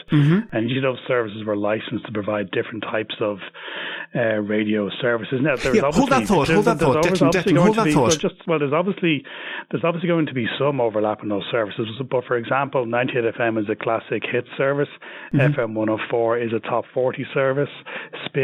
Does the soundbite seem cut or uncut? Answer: uncut